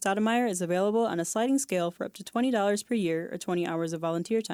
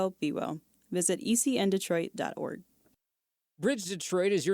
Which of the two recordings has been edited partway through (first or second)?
second